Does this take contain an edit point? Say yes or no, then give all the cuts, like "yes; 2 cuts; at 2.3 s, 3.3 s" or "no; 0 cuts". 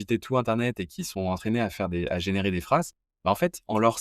yes; 1 cut; at 3.0 s